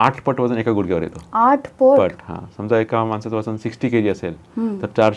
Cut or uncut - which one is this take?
uncut